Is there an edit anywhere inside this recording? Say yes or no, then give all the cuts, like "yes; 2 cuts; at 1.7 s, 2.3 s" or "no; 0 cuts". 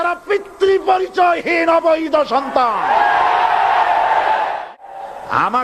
yes; 1 cut; at 4.7 s